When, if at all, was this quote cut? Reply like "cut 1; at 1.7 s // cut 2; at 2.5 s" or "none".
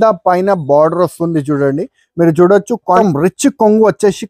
cut 1; at 3.0 s